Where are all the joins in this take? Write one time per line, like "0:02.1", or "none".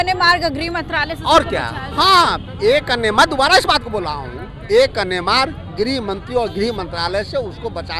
none